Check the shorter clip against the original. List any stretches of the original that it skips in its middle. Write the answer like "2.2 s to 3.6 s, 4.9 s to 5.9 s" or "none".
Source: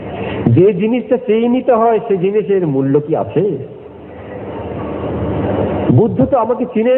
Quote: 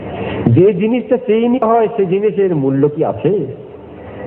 1.6 s to 1.7 s